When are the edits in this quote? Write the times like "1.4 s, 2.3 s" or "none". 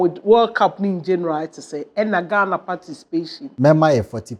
3.4 s